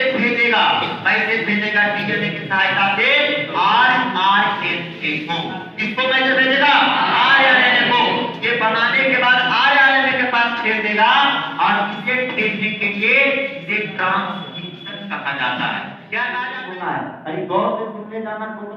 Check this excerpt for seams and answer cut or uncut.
cut